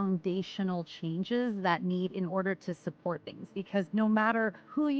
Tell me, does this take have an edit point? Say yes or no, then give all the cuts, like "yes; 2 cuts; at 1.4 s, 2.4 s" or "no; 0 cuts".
yes; 1 cut; at 3.9 s